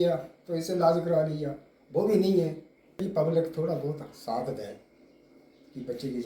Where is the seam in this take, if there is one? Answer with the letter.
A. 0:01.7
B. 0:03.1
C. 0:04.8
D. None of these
B